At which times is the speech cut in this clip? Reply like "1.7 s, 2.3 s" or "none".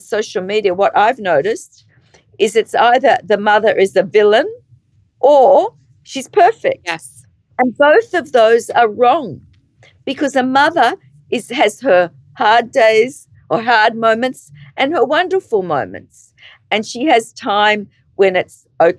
none